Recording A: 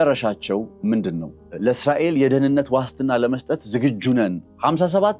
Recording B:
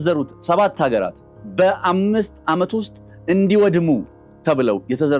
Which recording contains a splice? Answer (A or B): A